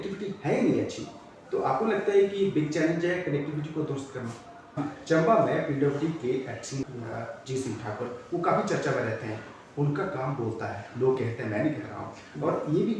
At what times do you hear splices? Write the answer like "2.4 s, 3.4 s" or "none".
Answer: 4.8 s, 6.8 s